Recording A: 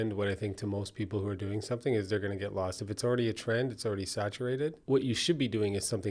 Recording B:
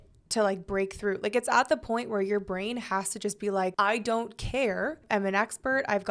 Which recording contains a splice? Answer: B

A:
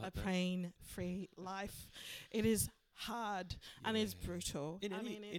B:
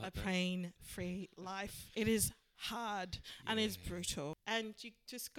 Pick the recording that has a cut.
B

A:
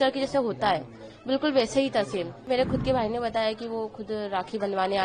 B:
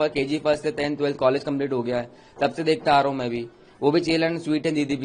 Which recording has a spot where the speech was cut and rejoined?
A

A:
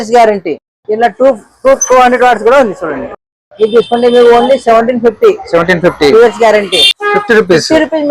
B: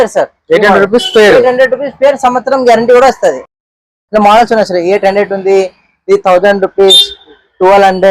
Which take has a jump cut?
A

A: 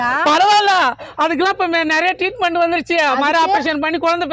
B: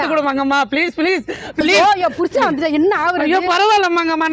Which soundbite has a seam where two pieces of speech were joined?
B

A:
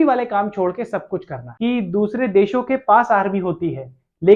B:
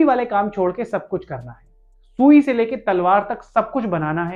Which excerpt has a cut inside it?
A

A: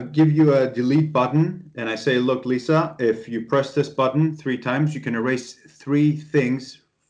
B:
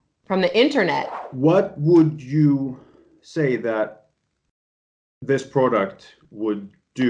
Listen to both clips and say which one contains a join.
B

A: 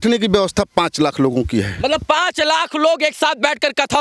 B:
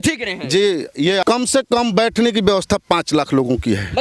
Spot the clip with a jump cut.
B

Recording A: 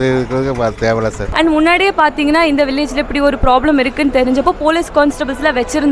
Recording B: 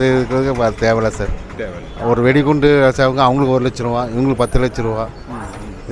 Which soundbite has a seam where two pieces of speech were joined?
A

